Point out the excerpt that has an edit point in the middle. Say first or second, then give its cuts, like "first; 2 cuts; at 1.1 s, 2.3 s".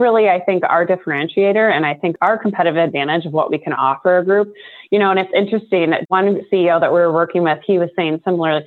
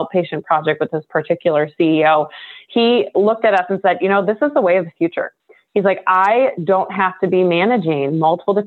first; 1 cut; at 2.1 s